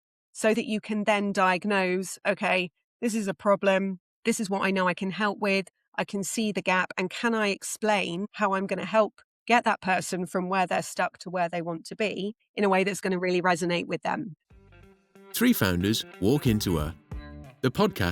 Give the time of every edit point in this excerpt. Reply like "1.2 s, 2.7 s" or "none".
14.4 s